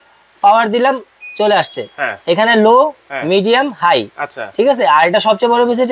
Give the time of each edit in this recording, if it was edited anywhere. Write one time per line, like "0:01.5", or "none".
none